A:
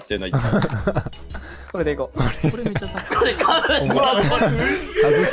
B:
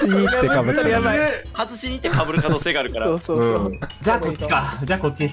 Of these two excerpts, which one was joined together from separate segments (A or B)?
B